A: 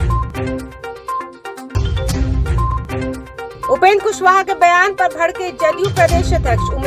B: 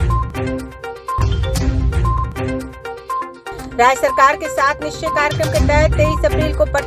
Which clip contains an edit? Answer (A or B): A